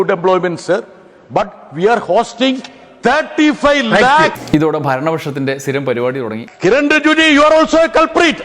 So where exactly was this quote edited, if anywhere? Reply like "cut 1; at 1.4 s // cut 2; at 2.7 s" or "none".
cut 1; at 4.4 s // cut 2; at 6.4 s